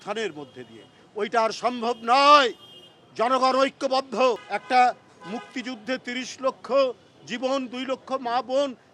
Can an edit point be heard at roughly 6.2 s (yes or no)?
no